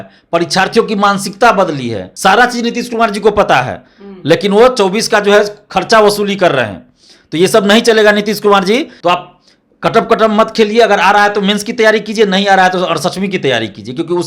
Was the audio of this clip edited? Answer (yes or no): yes